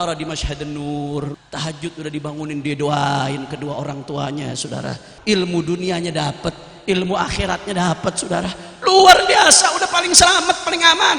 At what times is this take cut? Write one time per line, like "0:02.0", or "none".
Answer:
0:01.3
0:05.1